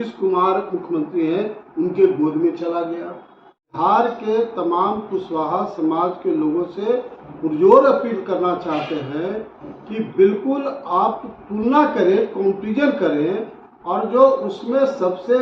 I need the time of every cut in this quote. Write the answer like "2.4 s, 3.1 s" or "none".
3.7 s